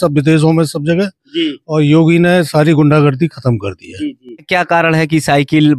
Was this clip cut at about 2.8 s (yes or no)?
no